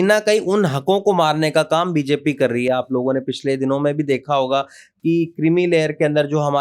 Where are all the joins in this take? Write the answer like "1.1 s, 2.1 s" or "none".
none